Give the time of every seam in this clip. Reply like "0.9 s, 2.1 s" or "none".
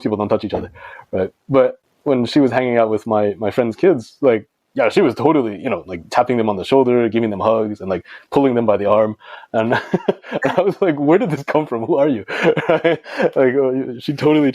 1.9 s